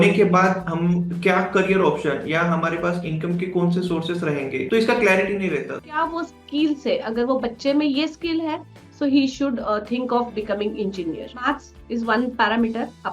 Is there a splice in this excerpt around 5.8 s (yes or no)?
yes